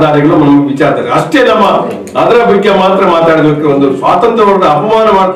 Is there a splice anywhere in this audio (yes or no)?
no